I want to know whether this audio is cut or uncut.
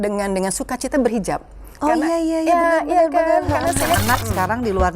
cut